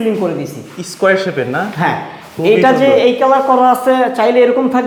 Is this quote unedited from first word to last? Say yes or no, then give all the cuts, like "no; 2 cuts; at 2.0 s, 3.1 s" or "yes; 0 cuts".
yes; 0 cuts